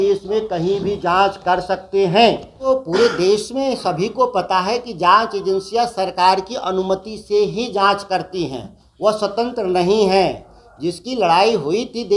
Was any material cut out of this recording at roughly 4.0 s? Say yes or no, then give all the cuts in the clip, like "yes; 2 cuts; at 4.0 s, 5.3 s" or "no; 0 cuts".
no; 1 cut; at 2.7 s